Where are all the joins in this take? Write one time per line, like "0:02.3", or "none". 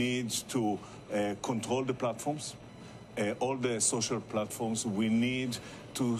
0:04.0